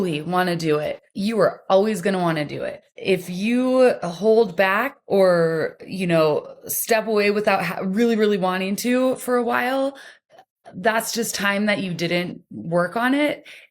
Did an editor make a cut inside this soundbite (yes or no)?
yes